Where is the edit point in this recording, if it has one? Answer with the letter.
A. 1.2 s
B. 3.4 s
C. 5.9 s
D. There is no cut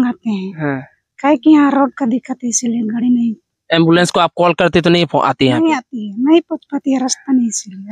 D